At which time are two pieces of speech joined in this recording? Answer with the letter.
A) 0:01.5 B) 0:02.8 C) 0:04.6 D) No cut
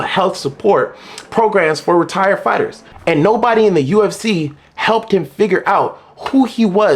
B